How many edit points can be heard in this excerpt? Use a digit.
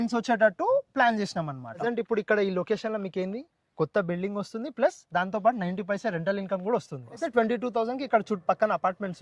2